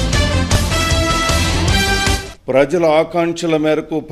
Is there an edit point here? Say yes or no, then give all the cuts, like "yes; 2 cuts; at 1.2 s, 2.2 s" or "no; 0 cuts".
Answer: yes; 2 cuts; at 1.3 s, 2.2 s